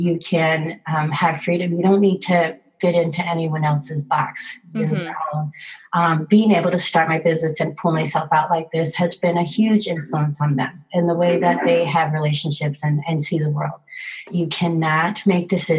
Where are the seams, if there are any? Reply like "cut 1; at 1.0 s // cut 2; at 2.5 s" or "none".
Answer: cut 1; at 14.3 s